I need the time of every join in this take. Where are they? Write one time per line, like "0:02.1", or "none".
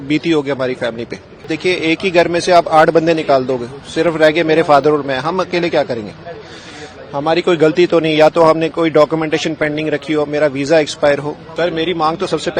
0:01.5
0:11.4